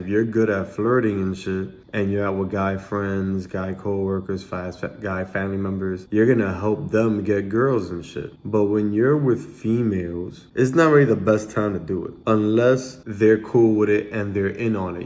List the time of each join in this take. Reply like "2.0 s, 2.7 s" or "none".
10.4 s, 12.1 s, 13.0 s

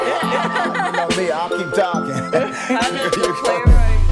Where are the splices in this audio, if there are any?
none

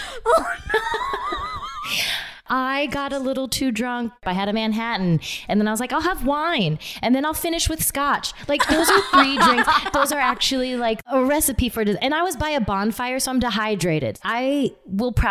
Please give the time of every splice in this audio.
2.4 s, 4.1 s, 11.1 s, 14.2 s

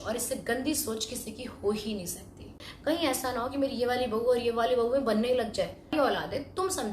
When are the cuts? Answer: 2.7 s, 5.9 s

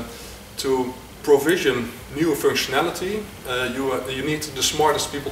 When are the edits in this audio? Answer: none

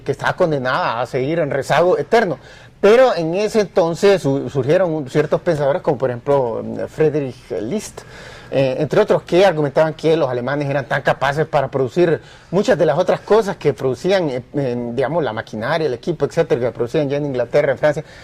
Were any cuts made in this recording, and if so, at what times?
none

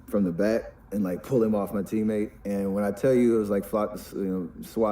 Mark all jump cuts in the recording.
1.9 s

